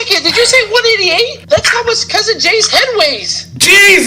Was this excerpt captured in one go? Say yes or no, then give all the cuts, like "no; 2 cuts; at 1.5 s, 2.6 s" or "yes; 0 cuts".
no; 1 cut; at 1.4 s